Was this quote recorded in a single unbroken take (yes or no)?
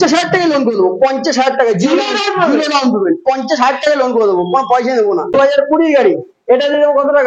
no